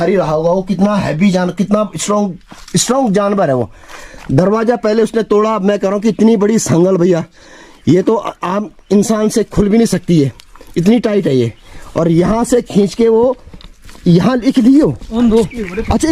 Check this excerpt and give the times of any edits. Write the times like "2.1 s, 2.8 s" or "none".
none